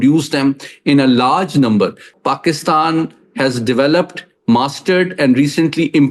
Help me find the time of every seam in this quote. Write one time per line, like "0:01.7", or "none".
0:02.1